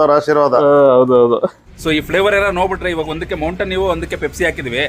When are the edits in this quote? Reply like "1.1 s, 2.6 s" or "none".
1.6 s